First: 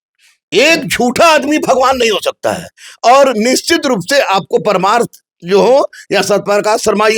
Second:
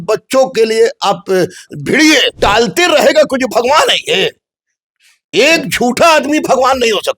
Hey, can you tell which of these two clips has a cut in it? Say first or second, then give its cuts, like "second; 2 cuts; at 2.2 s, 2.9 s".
second; 1 cut; at 2.3 s